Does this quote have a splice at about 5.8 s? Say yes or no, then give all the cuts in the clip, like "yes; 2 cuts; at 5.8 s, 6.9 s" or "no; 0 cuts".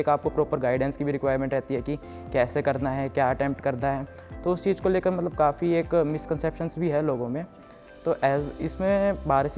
no; 0 cuts